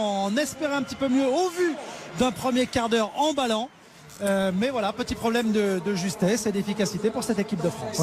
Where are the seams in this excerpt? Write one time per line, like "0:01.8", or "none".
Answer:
none